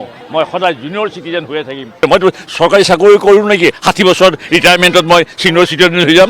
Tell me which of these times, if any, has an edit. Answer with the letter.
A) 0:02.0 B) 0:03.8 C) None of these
A